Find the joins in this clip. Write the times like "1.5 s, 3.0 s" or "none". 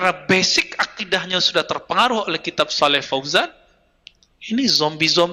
none

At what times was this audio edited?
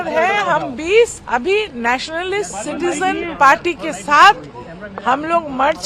1.2 s

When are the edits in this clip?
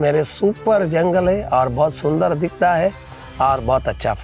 none

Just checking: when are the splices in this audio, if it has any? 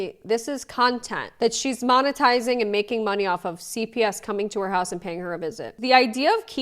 1.3 s, 5.7 s

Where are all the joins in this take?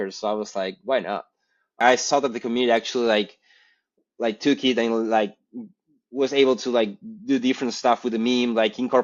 1.8 s

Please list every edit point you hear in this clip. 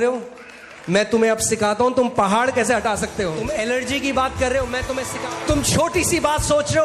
3.4 s, 5.1 s

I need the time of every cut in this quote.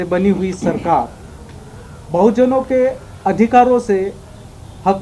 none

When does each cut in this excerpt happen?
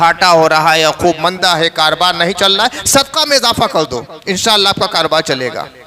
none

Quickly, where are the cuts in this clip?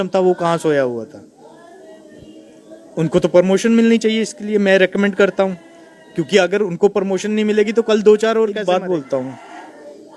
8.6 s

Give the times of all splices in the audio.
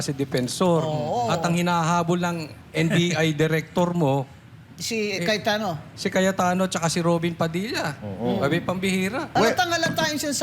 9.3 s

